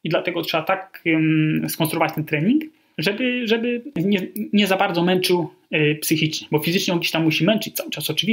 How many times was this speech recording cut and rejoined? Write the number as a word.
three